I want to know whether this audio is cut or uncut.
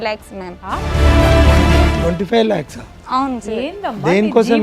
uncut